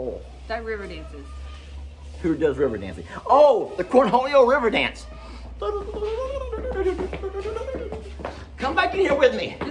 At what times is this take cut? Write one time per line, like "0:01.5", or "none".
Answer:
none